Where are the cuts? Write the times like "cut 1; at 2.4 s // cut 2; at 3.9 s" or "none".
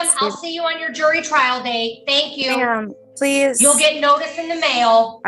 none